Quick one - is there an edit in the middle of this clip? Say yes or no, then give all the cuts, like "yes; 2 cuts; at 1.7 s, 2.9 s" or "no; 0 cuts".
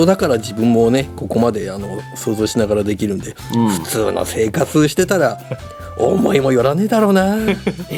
no; 0 cuts